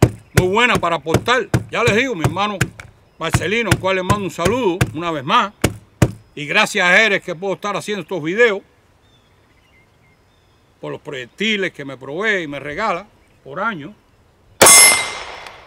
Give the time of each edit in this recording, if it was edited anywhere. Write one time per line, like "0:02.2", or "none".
none